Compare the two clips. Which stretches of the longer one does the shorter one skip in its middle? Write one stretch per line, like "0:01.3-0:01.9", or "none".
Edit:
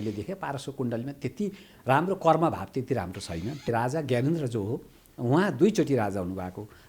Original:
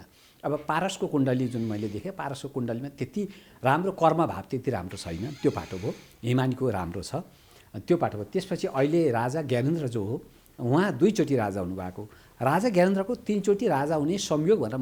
0:05.4-0:09.1